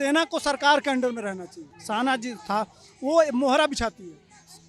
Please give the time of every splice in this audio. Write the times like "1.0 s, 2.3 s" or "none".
none